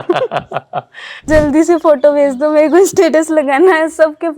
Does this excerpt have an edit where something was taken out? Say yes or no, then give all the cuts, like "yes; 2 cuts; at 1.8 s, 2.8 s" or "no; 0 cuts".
yes; 1 cut; at 1.2 s